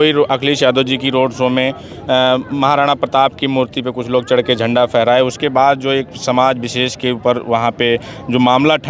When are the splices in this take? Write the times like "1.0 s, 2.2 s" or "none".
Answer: none